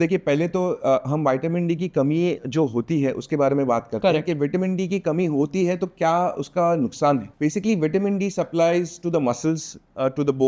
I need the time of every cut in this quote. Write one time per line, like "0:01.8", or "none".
0:07.3

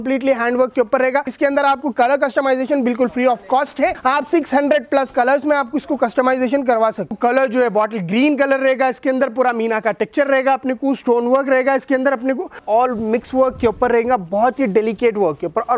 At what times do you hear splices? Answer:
0:01.3
0:04.0
0:07.2
0:12.6

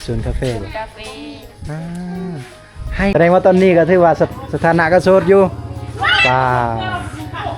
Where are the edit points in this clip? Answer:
0:03.1

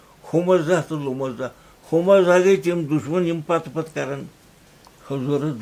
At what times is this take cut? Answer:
none

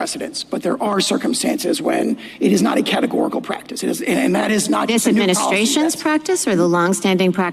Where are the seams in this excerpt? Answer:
none

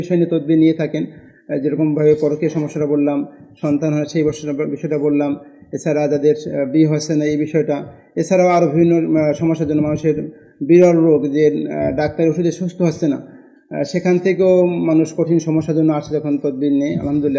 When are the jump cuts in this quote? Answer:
none

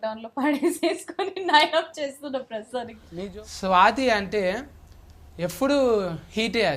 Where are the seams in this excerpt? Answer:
0:03.0

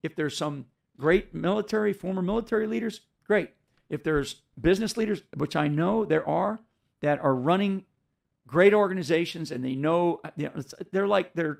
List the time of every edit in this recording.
none

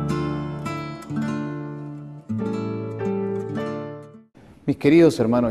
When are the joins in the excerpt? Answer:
0:01.2

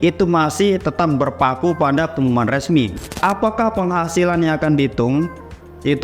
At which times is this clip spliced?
0:03.2

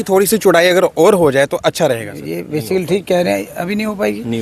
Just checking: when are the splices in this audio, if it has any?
none

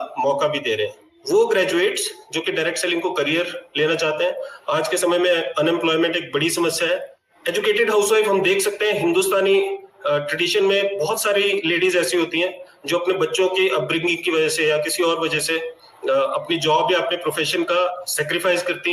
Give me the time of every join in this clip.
0:01.1
0:07.2

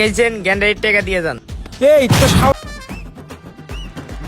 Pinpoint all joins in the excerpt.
0:02.5

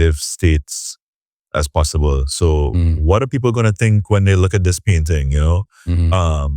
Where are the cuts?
none

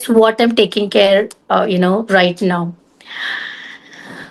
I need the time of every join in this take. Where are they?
none

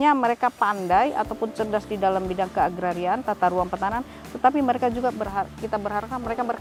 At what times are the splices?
none

